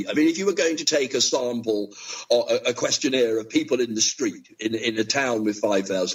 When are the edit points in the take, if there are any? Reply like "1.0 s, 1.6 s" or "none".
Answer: none